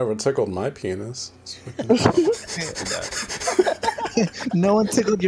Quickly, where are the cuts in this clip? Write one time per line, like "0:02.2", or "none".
none